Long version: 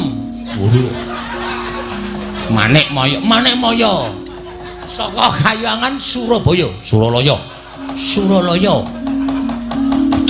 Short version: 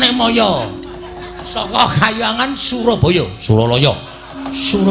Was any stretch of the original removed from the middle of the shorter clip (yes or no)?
no